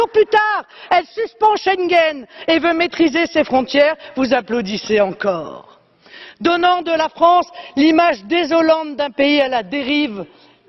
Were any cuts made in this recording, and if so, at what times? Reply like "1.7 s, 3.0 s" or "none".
2.4 s